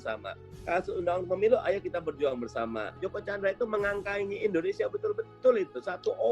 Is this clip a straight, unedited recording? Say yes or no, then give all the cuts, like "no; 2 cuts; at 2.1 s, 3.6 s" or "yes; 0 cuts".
no; 1 cut; at 3.0 s